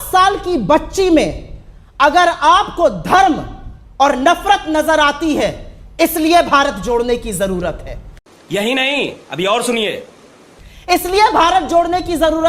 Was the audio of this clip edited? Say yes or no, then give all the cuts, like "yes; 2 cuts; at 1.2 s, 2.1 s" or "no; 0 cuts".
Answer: no; 0 cuts